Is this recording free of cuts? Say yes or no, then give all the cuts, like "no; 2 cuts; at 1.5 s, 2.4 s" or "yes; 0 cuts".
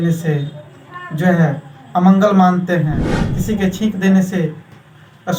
yes; 0 cuts